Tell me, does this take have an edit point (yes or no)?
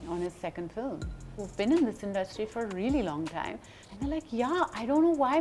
yes